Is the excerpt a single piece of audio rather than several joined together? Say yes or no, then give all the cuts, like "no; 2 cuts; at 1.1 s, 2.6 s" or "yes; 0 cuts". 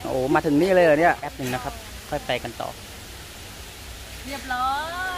no; 1 cut; at 1.3 s